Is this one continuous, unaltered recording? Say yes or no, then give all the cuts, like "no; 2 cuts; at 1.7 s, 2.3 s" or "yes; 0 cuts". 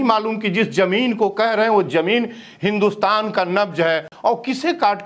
no; 1 cut; at 4.1 s